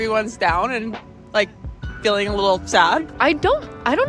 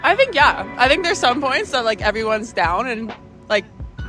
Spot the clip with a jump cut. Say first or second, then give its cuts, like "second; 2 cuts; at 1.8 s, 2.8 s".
first; 1 cut; at 3.1 s